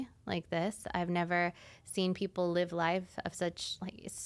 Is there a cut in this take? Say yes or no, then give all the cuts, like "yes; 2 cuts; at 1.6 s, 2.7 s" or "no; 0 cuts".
no; 0 cuts